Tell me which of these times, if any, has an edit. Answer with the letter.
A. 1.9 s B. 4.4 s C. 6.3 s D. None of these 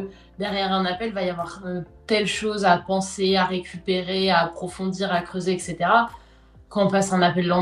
D